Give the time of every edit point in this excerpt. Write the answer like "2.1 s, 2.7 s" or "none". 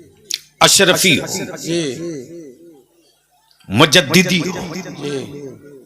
none